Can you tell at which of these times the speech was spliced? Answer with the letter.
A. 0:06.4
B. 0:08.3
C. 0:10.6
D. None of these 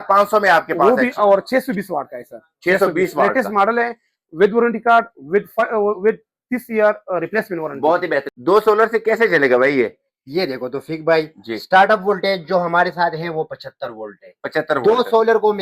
B